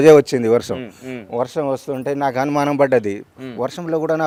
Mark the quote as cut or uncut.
uncut